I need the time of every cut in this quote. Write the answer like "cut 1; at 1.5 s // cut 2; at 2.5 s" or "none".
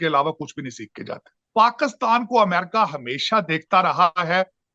cut 1; at 1.3 s